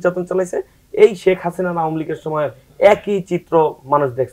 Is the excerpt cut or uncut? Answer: uncut